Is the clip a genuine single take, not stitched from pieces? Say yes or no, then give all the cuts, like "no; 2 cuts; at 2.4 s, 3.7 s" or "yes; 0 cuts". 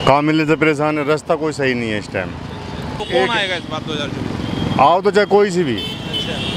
yes; 0 cuts